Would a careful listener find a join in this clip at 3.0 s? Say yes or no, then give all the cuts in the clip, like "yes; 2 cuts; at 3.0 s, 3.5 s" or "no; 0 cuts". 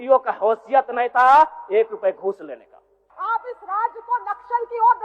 yes; 1 cut; at 3.0 s